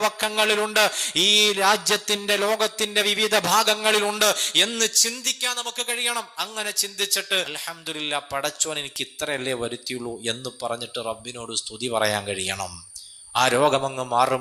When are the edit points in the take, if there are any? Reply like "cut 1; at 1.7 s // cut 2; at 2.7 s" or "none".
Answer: cut 1; at 7.6 s